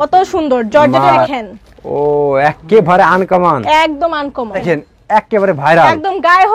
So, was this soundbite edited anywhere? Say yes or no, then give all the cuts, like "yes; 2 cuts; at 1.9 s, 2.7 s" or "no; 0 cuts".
yes; 2 cuts; at 1.3 s, 4.6 s